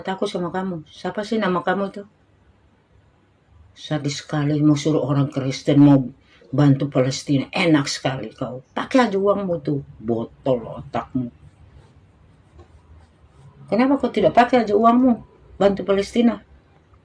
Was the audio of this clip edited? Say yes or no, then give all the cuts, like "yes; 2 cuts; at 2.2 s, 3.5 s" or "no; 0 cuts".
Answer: no; 0 cuts